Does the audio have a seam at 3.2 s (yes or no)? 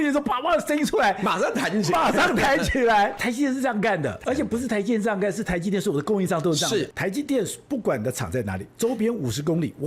yes